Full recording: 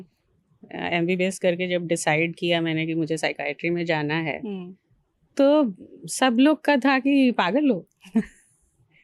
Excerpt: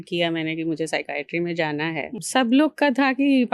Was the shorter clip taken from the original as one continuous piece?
no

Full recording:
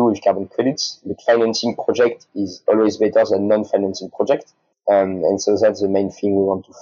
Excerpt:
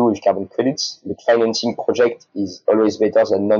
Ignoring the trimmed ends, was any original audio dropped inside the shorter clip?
no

